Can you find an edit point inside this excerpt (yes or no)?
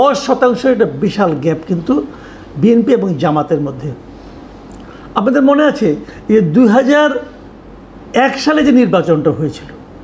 no